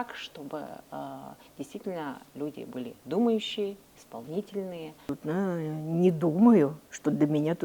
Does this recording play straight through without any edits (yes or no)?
no